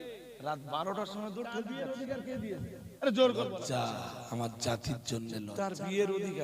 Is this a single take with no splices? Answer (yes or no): no